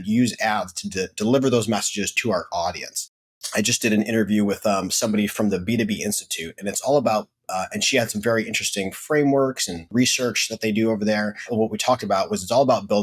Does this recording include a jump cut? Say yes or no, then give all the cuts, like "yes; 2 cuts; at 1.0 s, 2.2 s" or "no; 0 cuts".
yes; 4 cuts; at 2.1 s, 3.4 s, 9.9 s, 11.5 s